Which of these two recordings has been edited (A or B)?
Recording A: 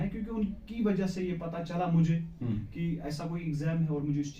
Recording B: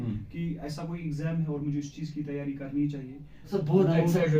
B